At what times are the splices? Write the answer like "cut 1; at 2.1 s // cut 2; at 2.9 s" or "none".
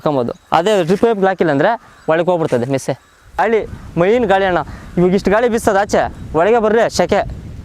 cut 1; at 3.4 s